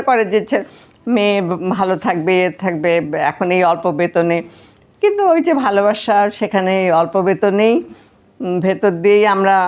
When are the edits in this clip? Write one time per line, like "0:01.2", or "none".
none